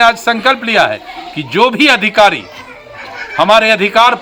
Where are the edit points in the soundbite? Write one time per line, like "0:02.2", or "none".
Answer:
none